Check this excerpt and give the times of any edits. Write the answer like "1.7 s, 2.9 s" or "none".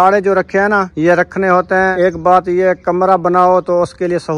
0.9 s, 1.9 s